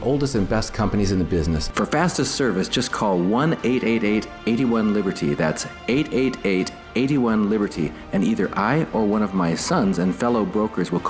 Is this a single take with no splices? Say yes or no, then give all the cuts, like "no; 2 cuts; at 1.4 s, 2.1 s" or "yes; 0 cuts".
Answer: no; 1 cut; at 1.7 s